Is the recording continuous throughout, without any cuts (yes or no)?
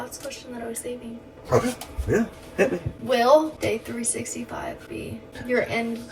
no